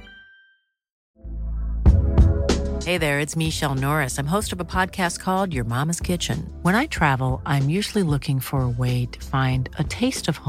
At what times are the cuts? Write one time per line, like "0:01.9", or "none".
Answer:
0:01.0